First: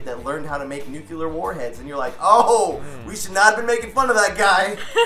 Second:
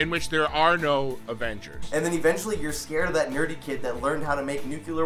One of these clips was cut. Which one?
second; 1 cut; at 1.8 s

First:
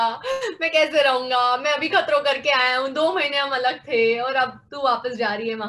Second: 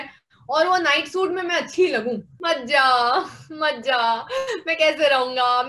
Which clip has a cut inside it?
second; 1 cut; at 2.3 s

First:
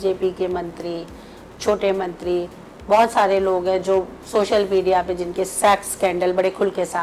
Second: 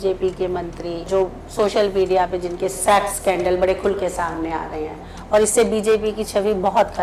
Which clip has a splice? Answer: second; 1 cut; at 1.1 s

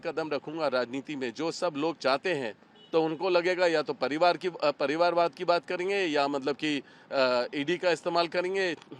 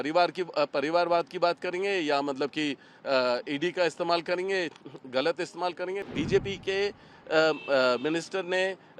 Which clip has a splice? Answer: second; 1 cut; at 6.0 s

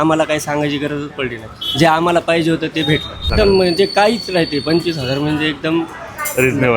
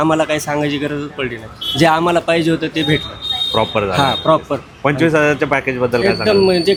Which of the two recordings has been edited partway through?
first; 1 cut; at 3.3 s

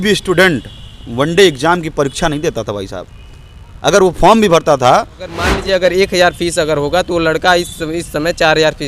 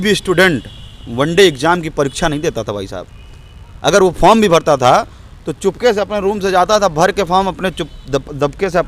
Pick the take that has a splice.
first; 1 cut; at 5.5 s

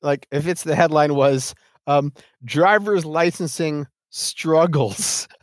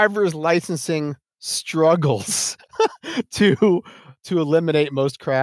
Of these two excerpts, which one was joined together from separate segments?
second; 1 cut; at 4.1 s

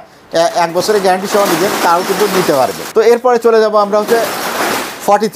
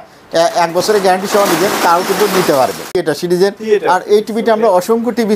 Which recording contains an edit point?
second; 1 cut; at 2.9 s

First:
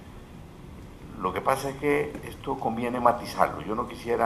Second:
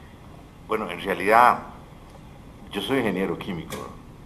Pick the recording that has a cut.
first; 1 cut; at 1.3 s

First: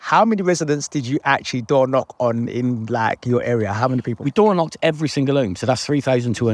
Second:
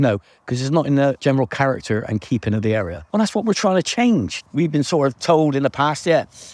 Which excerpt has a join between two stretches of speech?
second; 3 cuts; at 1.2 s, 3.0 s, 4.4 s

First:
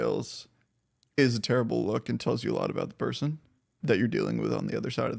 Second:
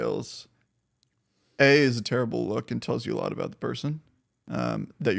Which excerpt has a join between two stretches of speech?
first; 2 cuts; at 1.2 s, 3.7 s

